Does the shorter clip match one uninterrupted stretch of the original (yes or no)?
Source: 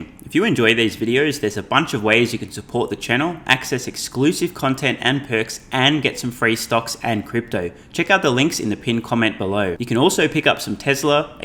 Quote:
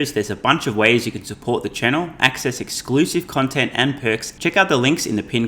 no